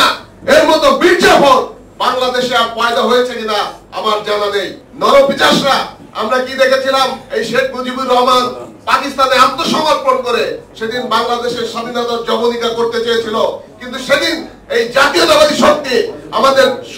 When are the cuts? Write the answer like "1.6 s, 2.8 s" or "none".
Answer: 4.8 s